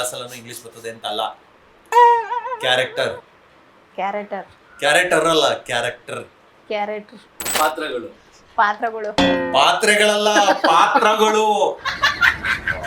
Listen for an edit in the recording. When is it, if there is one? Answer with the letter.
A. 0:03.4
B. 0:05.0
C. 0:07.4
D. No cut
C